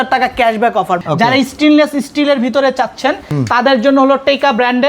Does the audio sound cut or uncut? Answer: cut